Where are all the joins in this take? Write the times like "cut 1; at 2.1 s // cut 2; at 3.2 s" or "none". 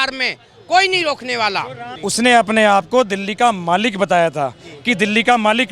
cut 1; at 1.8 s